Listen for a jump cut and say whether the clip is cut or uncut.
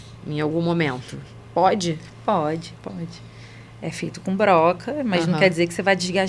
uncut